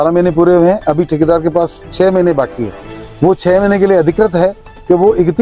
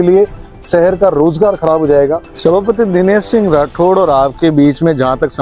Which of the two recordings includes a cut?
second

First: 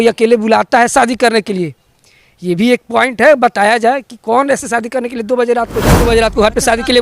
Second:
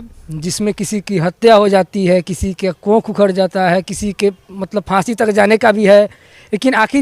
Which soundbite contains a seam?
first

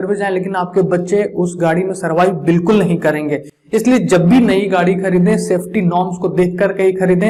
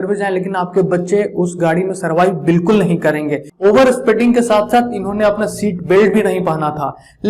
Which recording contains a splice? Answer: second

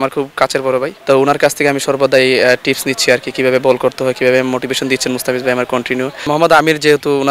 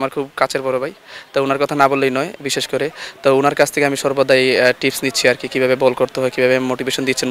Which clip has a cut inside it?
first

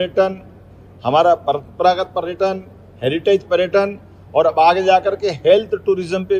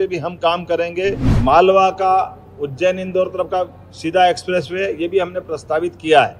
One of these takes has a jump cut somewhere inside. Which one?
second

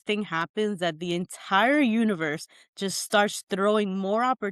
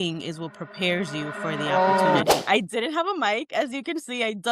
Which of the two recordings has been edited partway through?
second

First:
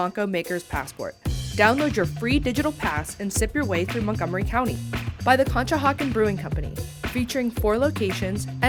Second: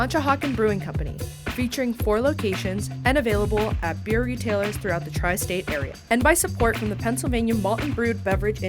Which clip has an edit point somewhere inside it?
second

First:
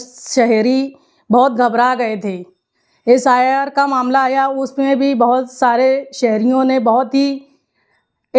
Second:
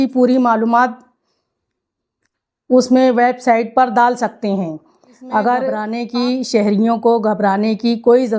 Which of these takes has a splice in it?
second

